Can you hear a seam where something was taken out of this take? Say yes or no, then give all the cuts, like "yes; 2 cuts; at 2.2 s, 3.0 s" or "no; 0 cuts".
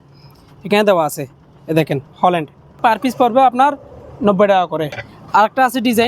yes; 2 cuts; at 2.8 s, 5.0 s